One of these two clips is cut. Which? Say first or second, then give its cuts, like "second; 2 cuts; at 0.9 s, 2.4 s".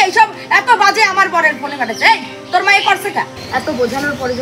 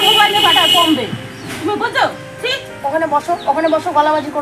first; 1 cut; at 3.4 s